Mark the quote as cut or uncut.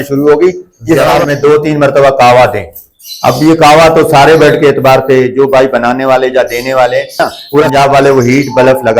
cut